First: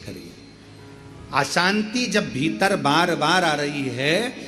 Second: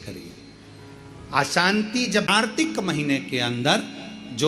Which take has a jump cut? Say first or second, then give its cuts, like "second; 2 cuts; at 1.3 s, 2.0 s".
second; 1 cut; at 2.4 s